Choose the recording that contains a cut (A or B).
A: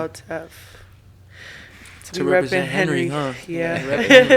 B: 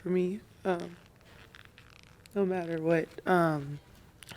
A